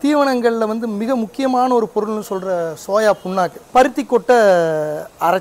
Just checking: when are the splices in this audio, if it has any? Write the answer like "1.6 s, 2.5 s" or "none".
3.6 s